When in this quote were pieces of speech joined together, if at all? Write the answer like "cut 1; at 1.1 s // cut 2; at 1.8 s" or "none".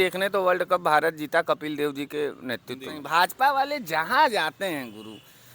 cut 1; at 3.0 s